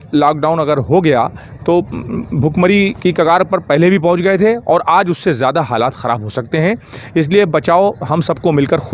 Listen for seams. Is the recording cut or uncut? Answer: uncut